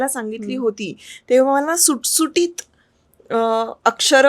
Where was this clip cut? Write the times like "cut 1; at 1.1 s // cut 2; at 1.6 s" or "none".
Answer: none